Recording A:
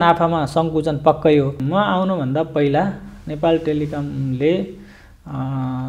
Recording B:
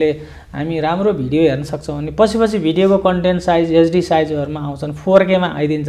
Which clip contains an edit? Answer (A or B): A